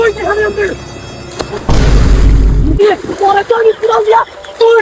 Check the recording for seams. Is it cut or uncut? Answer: cut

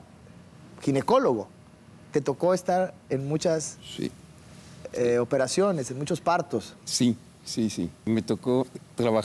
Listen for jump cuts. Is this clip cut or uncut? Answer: cut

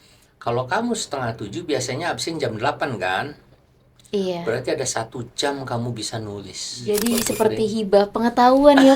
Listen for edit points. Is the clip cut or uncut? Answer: cut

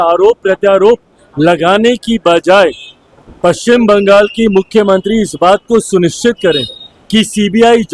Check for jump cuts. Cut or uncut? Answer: uncut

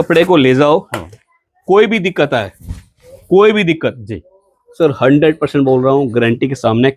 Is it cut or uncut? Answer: uncut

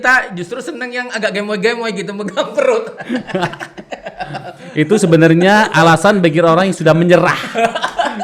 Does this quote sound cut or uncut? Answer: uncut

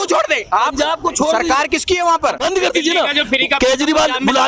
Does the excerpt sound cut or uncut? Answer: cut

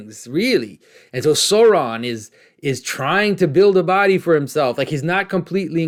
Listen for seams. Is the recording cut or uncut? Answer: uncut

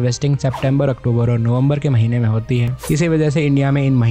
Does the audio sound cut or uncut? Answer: uncut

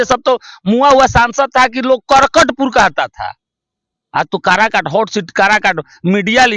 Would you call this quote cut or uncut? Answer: uncut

